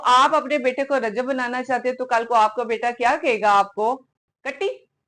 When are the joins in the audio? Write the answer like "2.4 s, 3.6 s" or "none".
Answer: none